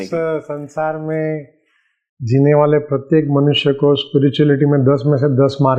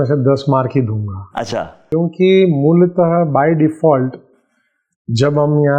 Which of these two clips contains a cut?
second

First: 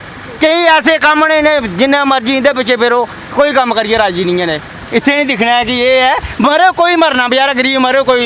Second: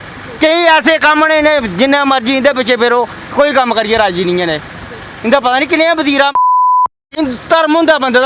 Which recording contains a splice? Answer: first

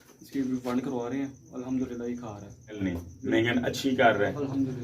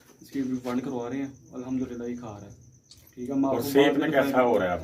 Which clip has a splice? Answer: first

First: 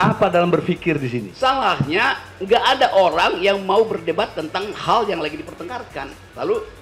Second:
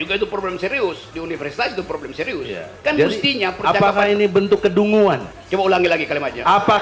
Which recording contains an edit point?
second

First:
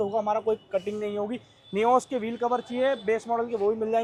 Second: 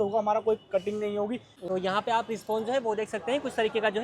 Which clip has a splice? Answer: second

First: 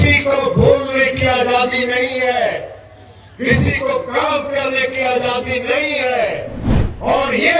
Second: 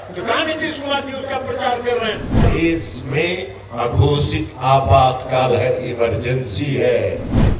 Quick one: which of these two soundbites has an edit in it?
second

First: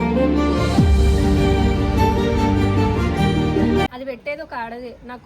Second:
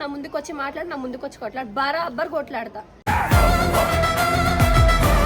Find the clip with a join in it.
first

